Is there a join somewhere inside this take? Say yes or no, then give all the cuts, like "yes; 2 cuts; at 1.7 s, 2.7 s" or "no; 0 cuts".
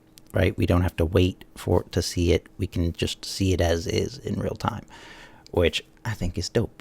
yes; 1 cut; at 5.9 s